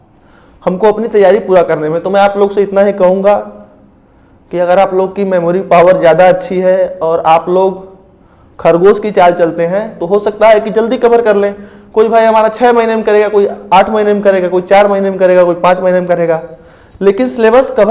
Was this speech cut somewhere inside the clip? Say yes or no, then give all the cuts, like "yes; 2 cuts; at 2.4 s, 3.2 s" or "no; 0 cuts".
no; 0 cuts